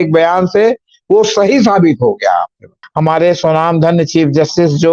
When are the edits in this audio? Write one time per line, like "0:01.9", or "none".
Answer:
0:02.8